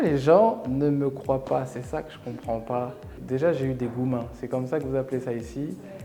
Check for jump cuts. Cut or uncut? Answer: cut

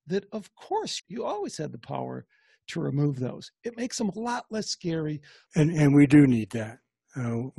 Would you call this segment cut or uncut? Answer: cut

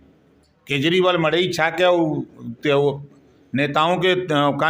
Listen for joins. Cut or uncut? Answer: uncut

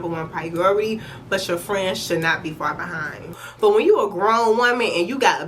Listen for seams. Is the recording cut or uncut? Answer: cut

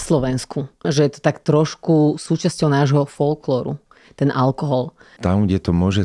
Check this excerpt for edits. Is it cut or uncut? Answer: cut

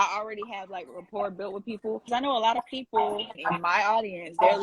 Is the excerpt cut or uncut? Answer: cut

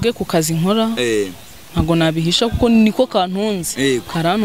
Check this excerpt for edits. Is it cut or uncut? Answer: uncut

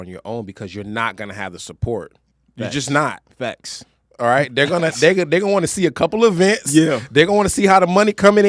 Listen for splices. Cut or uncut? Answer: uncut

